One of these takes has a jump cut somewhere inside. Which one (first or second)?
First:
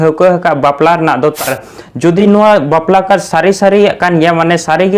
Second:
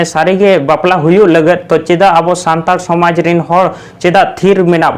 first